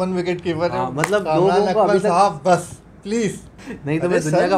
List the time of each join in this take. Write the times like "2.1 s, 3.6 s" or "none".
3.6 s

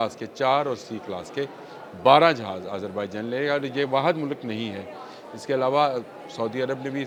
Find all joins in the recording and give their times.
none

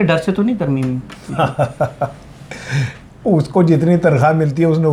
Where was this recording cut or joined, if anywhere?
none

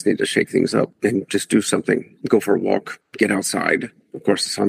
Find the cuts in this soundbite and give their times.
0.9 s, 3.0 s

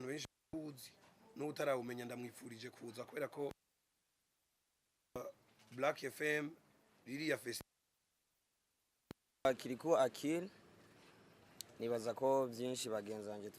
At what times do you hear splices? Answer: 9.3 s

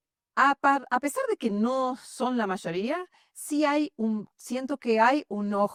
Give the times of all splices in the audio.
none

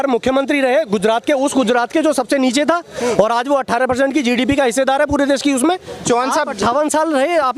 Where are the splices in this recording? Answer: 6.0 s

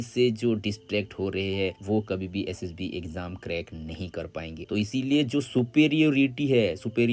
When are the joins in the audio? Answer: 4.7 s

